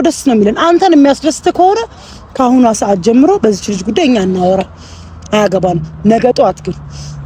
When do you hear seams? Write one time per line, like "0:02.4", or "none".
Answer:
none